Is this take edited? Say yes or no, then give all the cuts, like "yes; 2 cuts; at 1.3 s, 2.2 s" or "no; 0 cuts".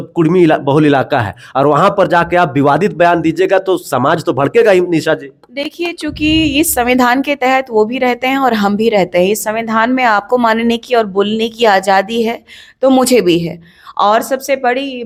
no; 0 cuts